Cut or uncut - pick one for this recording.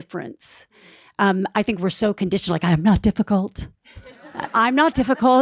uncut